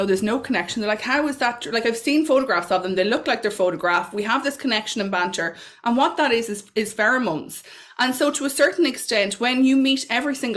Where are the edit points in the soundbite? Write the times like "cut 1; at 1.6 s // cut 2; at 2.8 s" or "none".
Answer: none